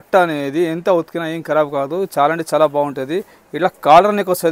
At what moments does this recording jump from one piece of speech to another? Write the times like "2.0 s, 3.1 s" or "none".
none